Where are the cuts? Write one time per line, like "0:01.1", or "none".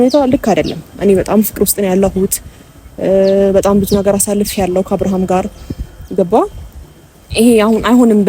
none